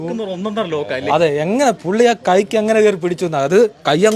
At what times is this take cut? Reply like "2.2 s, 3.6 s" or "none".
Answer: none